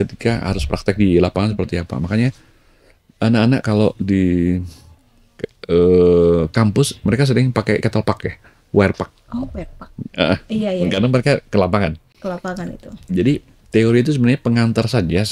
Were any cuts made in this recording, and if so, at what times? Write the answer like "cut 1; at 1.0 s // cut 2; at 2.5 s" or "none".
none

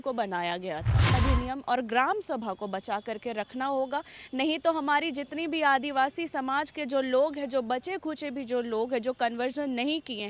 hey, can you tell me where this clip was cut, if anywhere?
cut 1; at 1.1 s

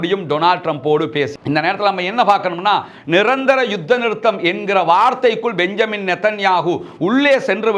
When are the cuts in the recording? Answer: cut 1; at 1.4 s

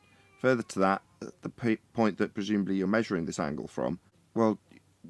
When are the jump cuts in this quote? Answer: cut 1; at 4.2 s

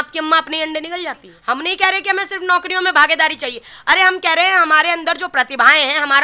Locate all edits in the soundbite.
cut 1; at 1.3 s

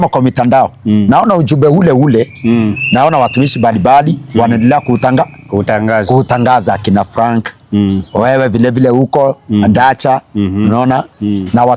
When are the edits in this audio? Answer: none

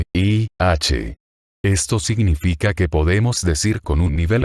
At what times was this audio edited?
cut 1; at 1.2 s

